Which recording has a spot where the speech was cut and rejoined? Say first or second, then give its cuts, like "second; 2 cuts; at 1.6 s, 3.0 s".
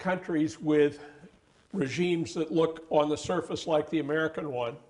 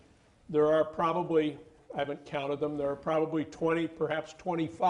second; 1 cut; at 2.2 s